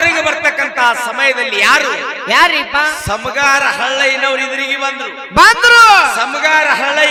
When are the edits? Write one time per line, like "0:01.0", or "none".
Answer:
none